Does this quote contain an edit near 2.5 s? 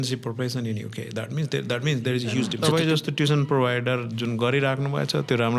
yes; 1 cut; at 2.5 s

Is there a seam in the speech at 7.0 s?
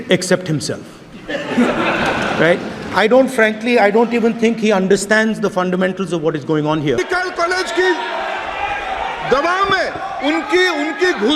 yes; 1 cut; at 7.0 s

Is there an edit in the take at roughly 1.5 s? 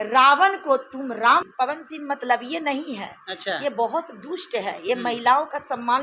yes; 1 cut; at 1.5 s

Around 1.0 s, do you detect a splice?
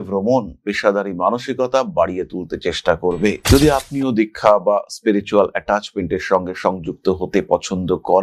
no; 1 cut; at 3.4 s

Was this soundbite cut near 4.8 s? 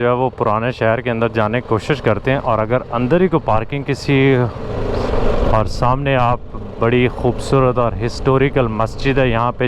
yes; 1 cut; at 4.8 s

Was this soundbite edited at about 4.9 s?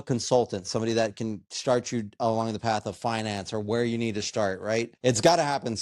yes; 1 cut; at 4.9 s

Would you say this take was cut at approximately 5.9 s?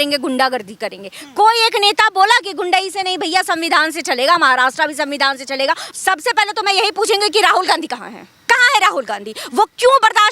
yes; 1 cut; at 5.9 s

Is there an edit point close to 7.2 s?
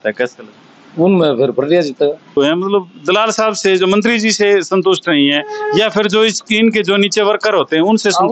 no; 1 cut; at 2.4 s

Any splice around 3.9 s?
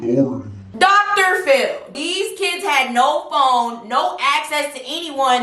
no; 1 cut; at 1.9 s

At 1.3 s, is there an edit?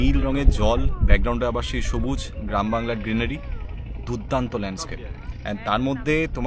no; 0 cuts

